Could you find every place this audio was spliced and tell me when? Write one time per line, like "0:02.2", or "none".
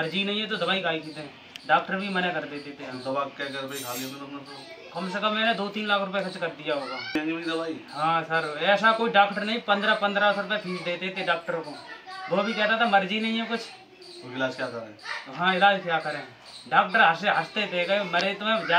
0:07.2